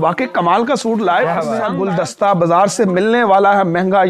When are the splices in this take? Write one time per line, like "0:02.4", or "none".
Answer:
0:01.7